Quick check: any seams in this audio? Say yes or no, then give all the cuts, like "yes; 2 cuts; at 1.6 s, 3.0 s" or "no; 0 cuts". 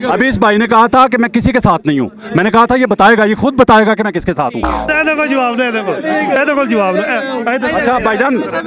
yes; 1 cut; at 4.9 s